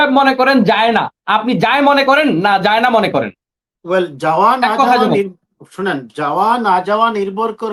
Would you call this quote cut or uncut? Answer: uncut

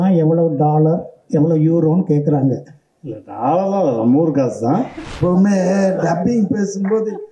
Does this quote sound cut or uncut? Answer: cut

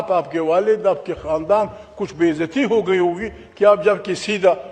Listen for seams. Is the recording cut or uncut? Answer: uncut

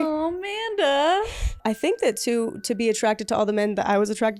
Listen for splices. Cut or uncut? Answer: cut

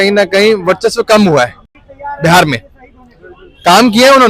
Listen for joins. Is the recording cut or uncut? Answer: uncut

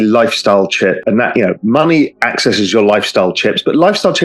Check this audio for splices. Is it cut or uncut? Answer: cut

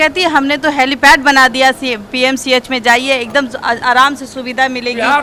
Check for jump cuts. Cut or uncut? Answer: uncut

